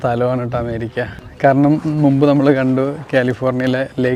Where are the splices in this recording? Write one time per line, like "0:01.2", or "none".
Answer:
none